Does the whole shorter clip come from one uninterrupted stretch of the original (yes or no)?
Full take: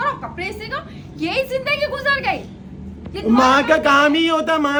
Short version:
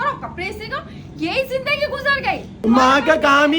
no